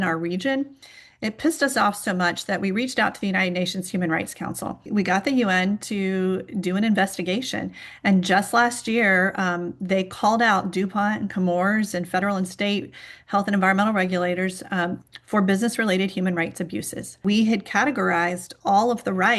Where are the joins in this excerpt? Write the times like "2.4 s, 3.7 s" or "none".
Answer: 4.9 s, 17.2 s